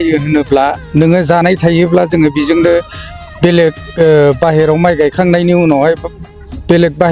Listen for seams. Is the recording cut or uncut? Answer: uncut